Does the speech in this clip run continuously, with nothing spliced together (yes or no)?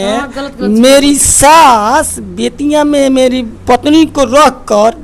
yes